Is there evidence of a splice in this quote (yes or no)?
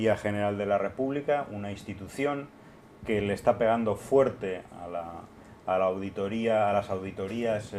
yes